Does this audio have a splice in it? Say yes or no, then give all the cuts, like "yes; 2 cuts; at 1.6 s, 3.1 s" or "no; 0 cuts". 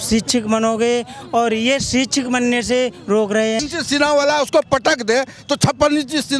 yes; 1 cut; at 3.6 s